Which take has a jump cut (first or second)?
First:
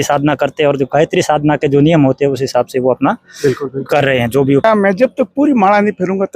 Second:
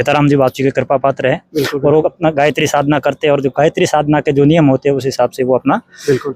first